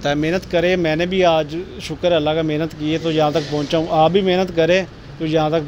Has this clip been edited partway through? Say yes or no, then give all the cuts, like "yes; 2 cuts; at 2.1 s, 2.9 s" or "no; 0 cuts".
no; 0 cuts